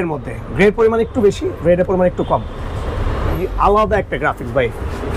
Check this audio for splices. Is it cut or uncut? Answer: cut